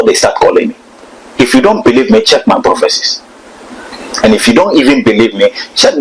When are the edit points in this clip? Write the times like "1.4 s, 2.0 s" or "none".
1.2 s

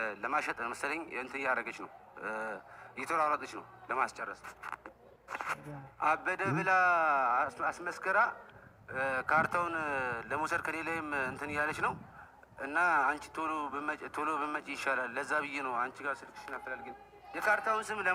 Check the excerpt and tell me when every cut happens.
none

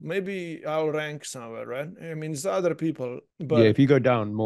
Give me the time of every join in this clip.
3.3 s

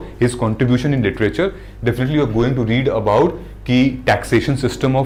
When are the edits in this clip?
none

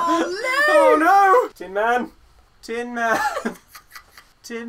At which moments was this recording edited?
1.6 s

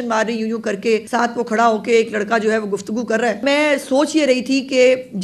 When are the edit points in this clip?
1.1 s, 3.4 s

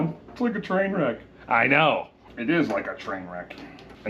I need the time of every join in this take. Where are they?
2.2 s

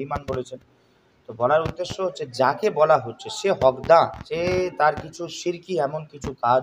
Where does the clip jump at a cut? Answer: 4.2 s

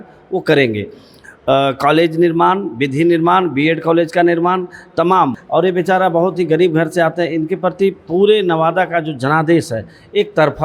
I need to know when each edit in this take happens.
5.4 s

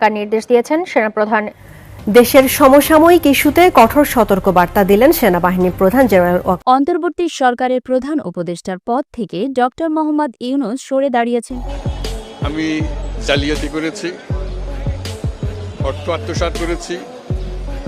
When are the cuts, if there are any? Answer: 6.6 s

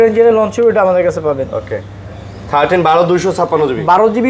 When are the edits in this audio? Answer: none

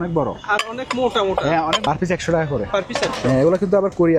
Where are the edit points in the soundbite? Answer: 1.8 s

